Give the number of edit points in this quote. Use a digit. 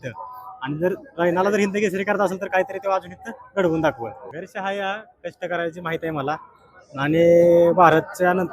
1